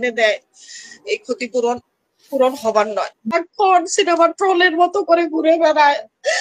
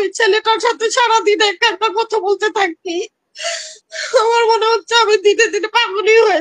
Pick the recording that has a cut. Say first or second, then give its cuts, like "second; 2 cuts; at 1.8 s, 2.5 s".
first; 1 cut; at 3.4 s